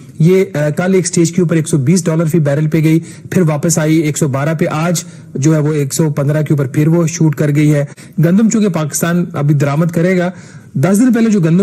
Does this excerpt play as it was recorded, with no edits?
no; 1 cut; at 8.0 s

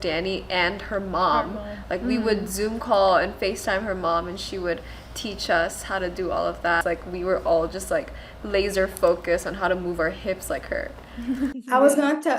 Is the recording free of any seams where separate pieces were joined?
no; 2 cuts; at 6.8 s, 11.6 s

